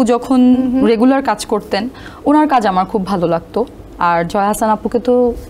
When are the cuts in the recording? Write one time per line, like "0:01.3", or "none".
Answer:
none